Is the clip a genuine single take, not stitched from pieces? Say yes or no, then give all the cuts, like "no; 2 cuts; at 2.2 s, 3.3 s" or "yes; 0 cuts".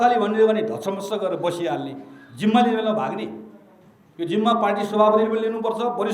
yes; 0 cuts